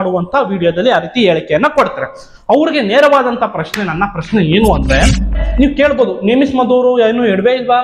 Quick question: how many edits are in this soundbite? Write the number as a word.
one